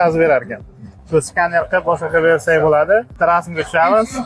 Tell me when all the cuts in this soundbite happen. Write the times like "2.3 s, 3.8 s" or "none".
3.1 s